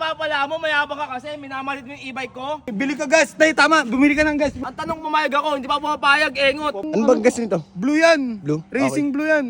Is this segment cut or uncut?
cut